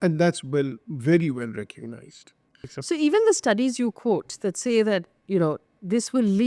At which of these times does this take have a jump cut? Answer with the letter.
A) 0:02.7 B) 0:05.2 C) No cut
A